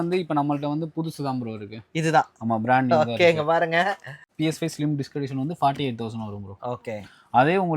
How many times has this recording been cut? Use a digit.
1